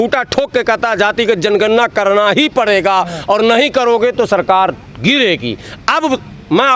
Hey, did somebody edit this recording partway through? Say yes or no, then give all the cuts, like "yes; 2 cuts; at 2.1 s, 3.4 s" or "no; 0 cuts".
no; 0 cuts